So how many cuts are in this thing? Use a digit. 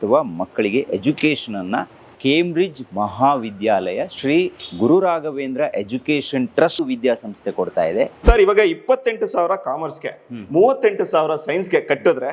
3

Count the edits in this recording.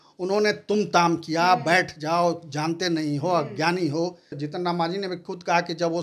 1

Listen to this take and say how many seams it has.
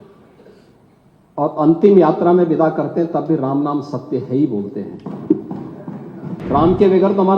1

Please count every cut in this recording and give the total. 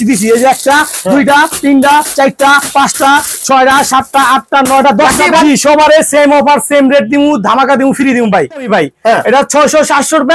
2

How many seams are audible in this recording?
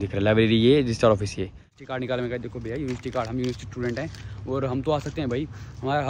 1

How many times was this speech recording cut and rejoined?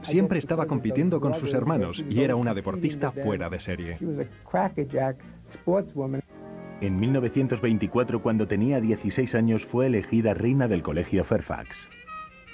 1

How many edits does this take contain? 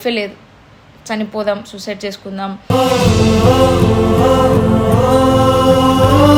0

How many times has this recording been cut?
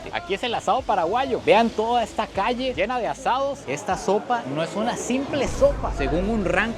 1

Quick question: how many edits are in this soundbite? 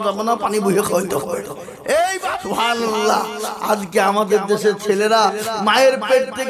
1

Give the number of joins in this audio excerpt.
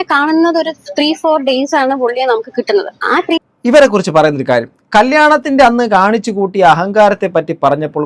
1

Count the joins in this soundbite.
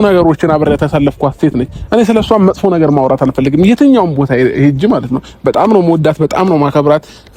0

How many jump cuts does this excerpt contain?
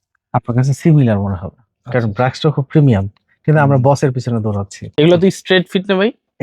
1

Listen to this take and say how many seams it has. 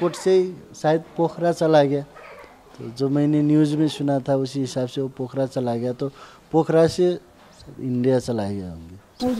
0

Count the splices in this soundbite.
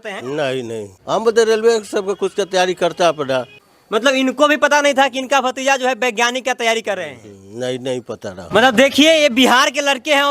3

